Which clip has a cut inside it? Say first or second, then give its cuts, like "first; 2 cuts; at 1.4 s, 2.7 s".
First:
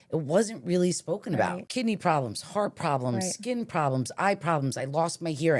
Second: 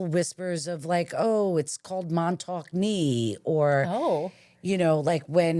first; 1 cut; at 1.6 s